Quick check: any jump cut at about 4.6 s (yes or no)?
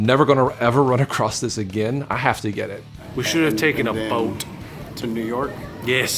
no